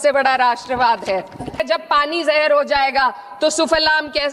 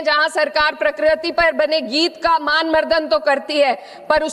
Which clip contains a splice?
first; 1 cut; at 1.6 s

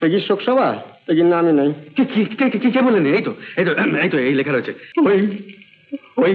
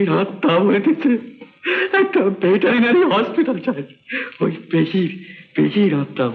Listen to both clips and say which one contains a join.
first; 1 cut; at 4.8 s

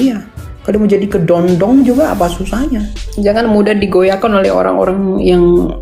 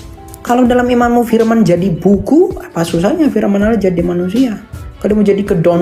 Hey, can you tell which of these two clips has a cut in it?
first; 1 cut; at 3.0 s

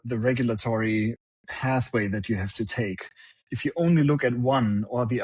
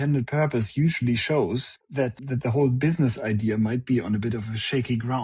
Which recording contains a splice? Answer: second; 1 cut; at 2.3 s

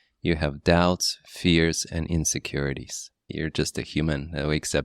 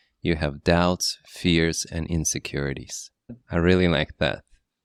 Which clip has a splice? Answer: first; 1 cut; at 3.3 s

